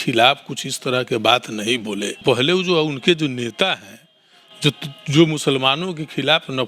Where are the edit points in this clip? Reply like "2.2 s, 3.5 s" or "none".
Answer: 2.2 s